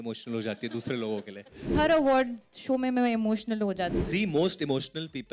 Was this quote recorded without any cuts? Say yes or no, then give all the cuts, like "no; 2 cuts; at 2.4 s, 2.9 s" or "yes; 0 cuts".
no; 2 cuts; at 1.6 s, 4.0 s